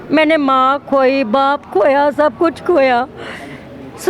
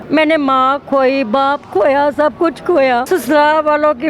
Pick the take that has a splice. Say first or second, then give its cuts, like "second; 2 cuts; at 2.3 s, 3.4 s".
second; 1 cut; at 3.0 s